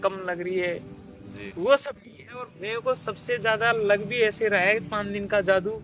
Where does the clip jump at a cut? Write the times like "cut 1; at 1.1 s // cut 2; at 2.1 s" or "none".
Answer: cut 1; at 2.6 s

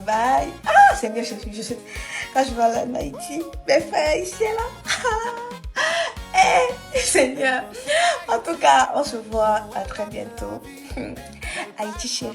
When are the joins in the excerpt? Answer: cut 1; at 1.7 s

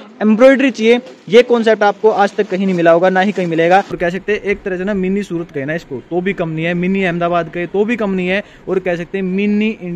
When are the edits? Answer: cut 1; at 3.9 s

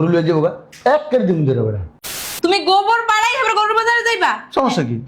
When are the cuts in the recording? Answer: cut 1; at 2.2 s

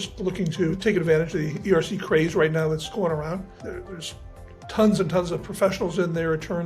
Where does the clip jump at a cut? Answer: cut 1; at 0.7 s // cut 2; at 3.5 s

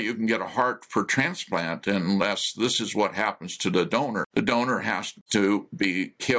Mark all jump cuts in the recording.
cut 1; at 4.3 s // cut 2; at 5.2 s

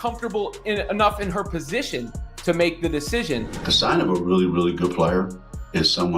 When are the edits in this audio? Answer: cut 1; at 3.6 s

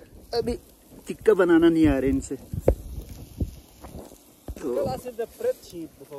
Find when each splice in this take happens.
none

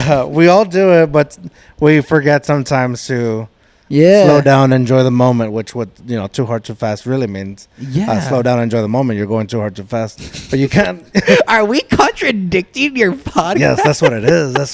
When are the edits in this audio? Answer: none

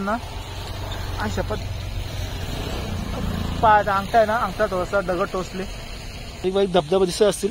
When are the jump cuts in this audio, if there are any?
cut 1; at 6.4 s

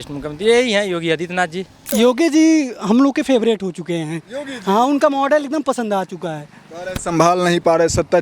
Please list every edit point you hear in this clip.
cut 1; at 1.8 s

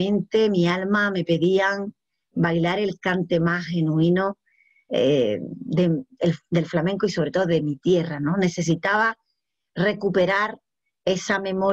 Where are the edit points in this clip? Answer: none

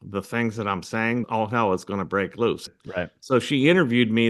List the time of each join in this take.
cut 1; at 1.2 s // cut 2; at 2.7 s

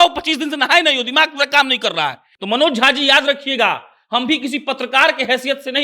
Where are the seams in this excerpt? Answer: cut 1; at 2.3 s

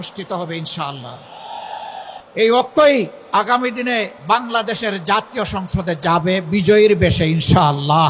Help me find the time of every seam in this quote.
cut 1; at 2.2 s // cut 2; at 3.2 s // cut 3; at 4.1 s

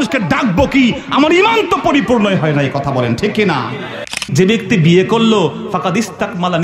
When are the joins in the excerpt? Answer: cut 1; at 4.2 s

